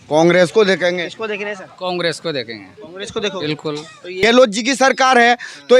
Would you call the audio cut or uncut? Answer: cut